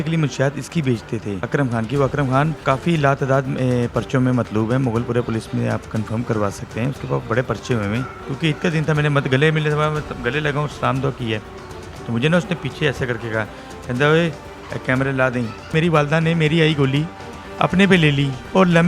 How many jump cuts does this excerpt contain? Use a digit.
4